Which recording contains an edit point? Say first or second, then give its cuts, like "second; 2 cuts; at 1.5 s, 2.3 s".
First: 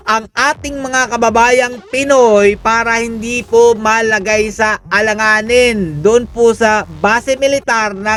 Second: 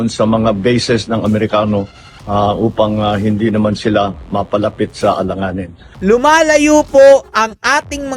second; 1 cut; at 5.9 s